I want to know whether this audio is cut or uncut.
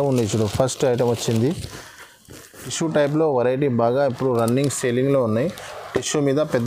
cut